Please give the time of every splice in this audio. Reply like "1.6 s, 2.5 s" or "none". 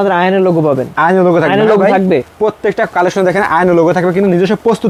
none